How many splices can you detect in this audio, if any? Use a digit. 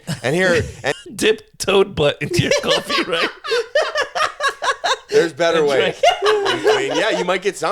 1